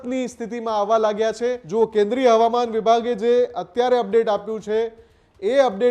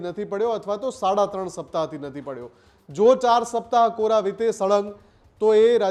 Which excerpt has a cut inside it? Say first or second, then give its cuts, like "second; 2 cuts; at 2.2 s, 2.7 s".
first; 1 cut; at 1.6 s